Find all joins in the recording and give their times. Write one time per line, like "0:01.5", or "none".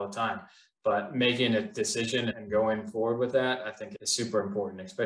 0:02.4
0:03.8

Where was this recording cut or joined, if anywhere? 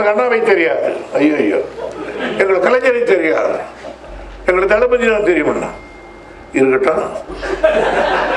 none

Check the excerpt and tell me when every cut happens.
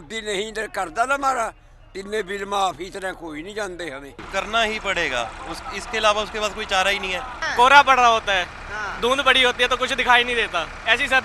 0:04.2
0:07.4

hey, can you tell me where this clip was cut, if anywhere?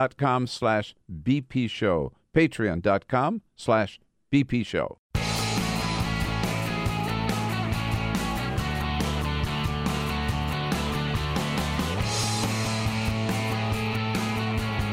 0:05.0

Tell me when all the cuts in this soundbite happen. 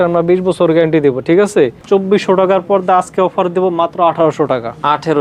0:01.8

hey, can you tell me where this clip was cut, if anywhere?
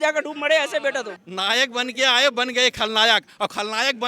0:01.2

